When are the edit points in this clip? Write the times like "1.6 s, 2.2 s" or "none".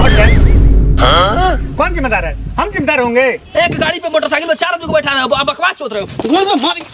3.4 s